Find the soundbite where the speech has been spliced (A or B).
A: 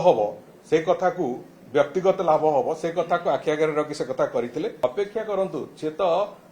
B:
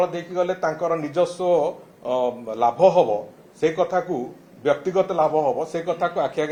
A